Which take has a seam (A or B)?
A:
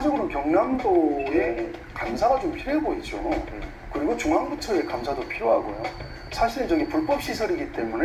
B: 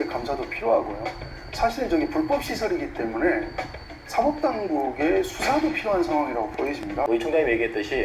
B